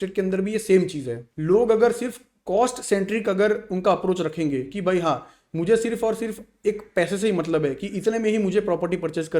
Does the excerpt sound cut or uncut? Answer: cut